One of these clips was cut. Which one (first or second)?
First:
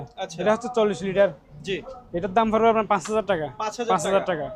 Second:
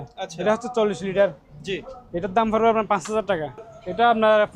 second